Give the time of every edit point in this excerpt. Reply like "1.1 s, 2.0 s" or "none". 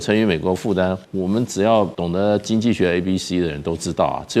1.1 s, 2.0 s